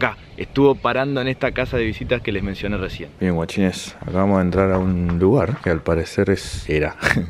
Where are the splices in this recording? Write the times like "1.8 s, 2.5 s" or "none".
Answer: 3.0 s